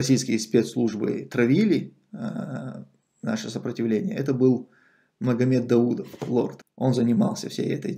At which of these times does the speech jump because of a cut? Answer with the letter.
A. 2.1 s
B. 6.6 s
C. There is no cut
B